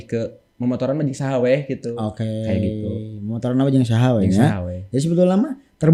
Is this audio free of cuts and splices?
yes; 0 cuts

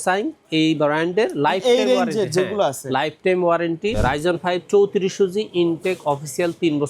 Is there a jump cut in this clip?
yes; 1 cut; at 4.0 s

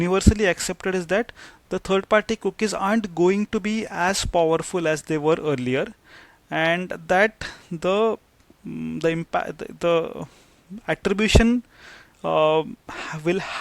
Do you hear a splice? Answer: no; 0 cuts

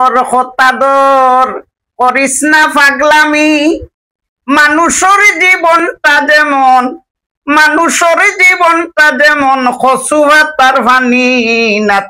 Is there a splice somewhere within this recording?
no; 0 cuts

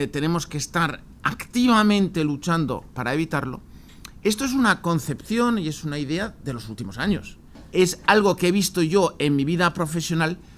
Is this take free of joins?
yes; 0 cuts

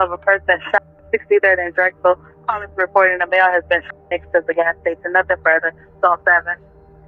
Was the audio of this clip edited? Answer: no; 0 cuts

